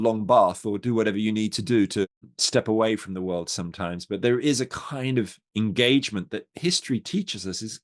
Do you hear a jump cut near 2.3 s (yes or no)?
yes